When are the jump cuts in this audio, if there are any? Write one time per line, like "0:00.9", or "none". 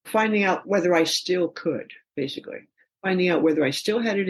none

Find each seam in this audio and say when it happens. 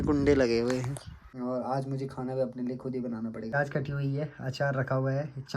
0:01.2
0:03.5

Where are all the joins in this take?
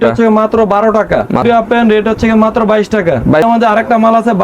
0:01.4
0:03.4

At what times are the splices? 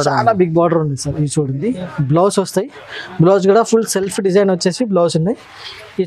0:01.6

